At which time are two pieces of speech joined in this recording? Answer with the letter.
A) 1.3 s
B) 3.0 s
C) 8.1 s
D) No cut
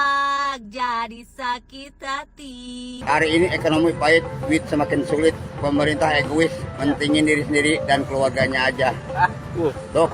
B